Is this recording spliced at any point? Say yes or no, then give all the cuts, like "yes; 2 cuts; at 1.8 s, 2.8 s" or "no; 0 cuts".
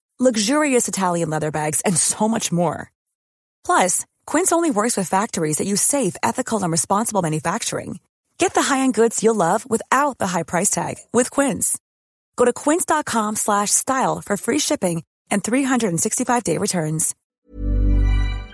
yes; 1 cut; at 17.2 s